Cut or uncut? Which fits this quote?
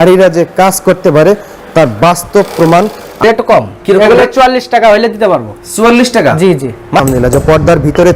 cut